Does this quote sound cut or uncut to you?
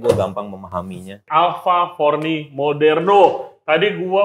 cut